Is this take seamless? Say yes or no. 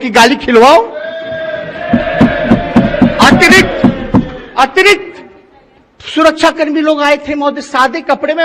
yes